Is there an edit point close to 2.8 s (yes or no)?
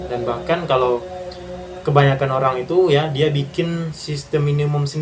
no